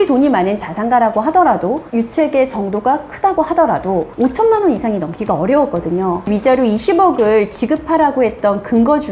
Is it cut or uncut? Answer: cut